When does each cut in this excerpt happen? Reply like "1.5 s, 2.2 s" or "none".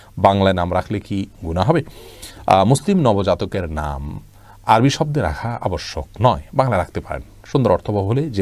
none